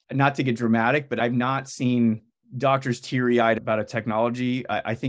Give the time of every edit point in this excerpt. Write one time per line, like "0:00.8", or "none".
0:01.2